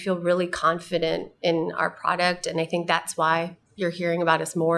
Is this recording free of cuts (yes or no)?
yes